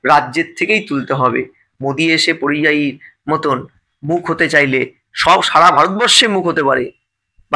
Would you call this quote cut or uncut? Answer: uncut